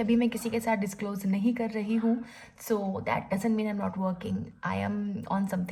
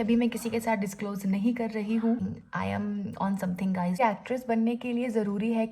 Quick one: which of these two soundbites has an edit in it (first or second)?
second